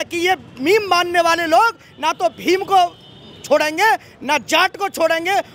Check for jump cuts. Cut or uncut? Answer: uncut